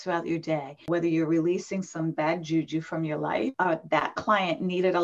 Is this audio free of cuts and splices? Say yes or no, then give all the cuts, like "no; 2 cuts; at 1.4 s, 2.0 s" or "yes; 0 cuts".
no; 2 cuts; at 0.8 s, 3.5 s